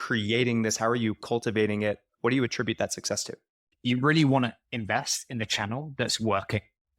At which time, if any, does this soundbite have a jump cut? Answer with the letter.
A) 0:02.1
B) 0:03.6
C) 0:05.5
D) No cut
B